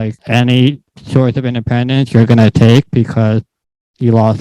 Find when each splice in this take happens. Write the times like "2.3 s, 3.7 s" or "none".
none